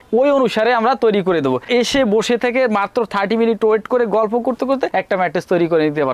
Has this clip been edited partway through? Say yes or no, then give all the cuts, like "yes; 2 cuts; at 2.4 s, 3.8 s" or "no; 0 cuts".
yes; 1 cut; at 1.6 s